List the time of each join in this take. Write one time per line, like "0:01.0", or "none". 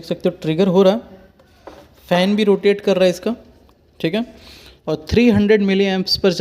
none